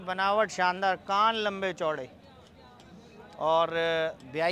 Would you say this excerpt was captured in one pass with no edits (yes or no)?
yes